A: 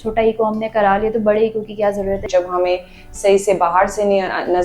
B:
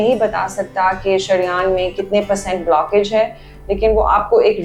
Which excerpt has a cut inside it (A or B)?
A